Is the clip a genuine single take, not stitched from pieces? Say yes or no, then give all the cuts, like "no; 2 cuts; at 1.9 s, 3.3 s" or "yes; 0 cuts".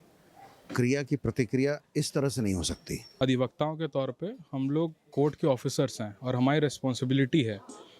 no; 1 cut; at 3.1 s